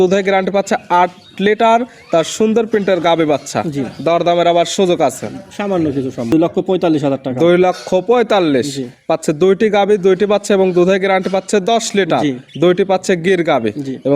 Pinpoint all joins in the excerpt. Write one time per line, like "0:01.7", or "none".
0:06.3